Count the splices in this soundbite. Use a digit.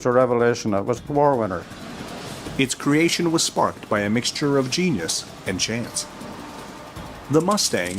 1